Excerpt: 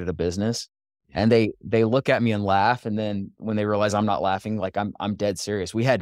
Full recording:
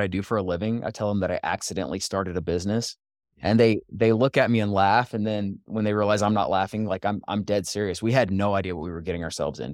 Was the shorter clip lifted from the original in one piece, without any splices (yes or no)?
yes